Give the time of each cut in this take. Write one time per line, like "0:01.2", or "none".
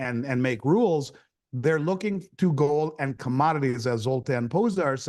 none